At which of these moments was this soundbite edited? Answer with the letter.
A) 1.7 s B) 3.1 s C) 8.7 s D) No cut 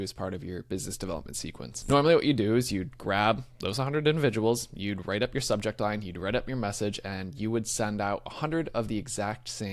A